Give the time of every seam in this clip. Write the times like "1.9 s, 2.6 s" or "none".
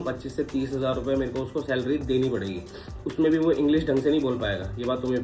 none